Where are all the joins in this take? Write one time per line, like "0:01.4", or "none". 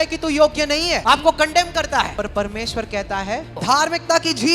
0:01.0
0:02.1
0:03.6